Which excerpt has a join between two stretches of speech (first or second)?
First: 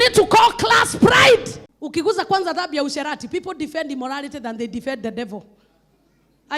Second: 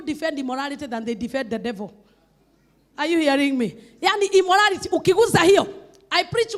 first